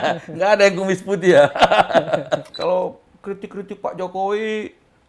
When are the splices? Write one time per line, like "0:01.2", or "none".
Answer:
0:02.5